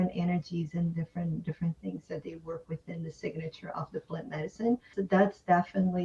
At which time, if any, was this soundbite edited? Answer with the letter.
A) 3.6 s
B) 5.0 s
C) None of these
B